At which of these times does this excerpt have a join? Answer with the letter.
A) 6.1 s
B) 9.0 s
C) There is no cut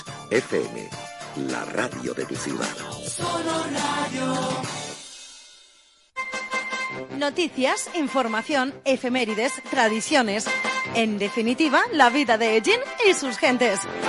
A